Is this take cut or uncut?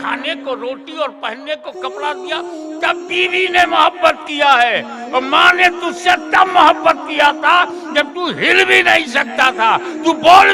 uncut